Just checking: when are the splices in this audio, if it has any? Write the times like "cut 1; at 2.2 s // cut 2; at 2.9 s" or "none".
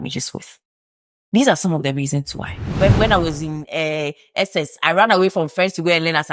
cut 1; at 2.6 s